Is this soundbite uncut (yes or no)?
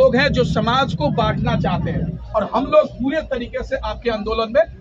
no